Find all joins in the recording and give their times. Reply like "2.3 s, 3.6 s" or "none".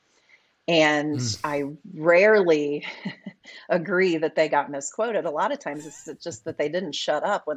none